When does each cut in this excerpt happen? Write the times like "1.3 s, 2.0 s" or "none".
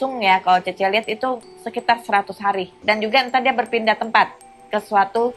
2.7 s